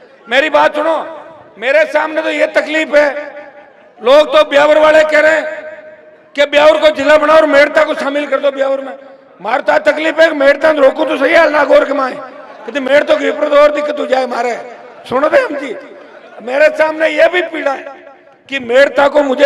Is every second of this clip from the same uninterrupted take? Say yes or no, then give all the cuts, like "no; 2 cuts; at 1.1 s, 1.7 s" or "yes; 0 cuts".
yes; 0 cuts